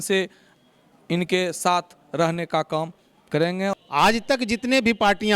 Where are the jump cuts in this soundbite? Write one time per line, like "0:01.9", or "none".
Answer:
0:03.8